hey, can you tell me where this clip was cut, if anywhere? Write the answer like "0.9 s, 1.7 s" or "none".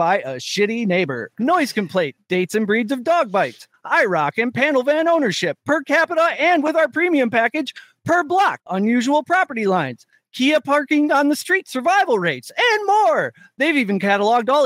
1.2 s, 2.2 s, 8.6 s